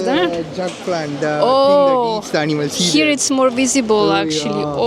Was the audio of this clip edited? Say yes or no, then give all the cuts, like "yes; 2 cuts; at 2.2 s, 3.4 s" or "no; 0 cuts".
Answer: no; 0 cuts